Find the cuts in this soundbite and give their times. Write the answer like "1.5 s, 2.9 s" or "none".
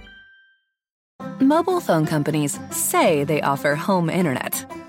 1.0 s